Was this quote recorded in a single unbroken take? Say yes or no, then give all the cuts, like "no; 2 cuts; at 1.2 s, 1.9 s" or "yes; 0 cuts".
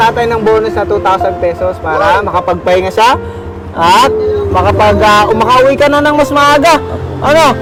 yes; 0 cuts